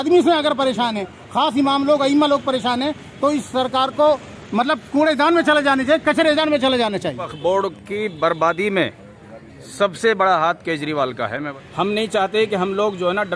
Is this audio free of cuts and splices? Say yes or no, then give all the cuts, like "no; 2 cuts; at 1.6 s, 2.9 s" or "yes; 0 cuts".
no; 2 cuts; at 7.2 s, 11.5 s